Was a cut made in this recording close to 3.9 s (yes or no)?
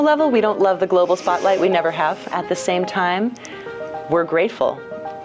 no